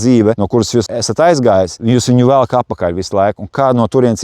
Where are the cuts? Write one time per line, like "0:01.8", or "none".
0:00.8
0:01.8